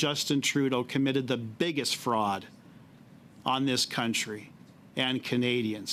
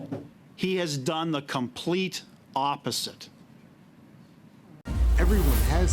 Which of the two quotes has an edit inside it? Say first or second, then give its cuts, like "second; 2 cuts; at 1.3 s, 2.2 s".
second; 1 cut; at 4.8 s